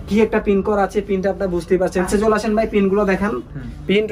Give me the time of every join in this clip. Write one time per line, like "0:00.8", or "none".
0:02.1